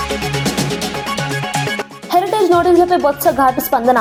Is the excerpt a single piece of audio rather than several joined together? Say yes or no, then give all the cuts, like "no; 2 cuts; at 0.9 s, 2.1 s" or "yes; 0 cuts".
yes; 0 cuts